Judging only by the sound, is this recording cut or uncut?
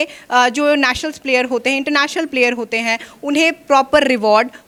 uncut